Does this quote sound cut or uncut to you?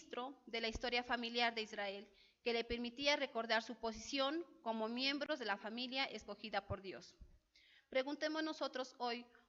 uncut